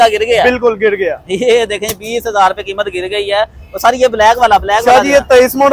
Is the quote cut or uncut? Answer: uncut